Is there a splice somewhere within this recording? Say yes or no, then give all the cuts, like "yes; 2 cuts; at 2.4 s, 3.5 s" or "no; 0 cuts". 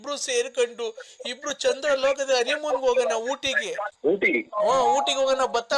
yes; 1 cut; at 3.9 s